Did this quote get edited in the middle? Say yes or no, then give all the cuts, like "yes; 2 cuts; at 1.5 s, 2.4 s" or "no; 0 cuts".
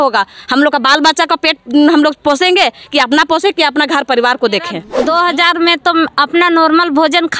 yes; 1 cut; at 4.9 s